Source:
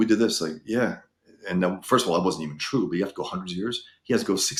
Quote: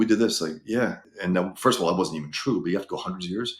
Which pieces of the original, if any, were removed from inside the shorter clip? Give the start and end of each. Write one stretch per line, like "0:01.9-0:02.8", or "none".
0:01.1-0:01.3